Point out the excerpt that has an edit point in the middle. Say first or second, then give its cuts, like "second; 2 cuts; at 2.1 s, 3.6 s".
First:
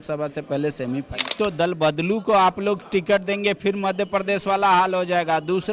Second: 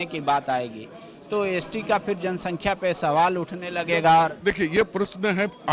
first; 1 cut; at 1.3 s